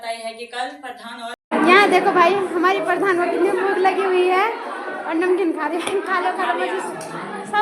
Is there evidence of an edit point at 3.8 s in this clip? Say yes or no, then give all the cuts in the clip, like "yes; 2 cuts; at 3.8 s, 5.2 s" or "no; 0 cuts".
no; 1 cut; at 1.4 s